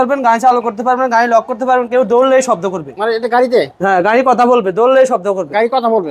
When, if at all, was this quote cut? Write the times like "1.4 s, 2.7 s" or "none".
none